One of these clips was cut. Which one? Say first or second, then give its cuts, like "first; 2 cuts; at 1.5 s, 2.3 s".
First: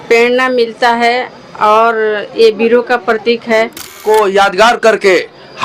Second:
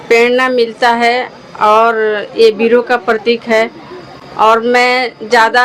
first; 1 cut; at 4.0 s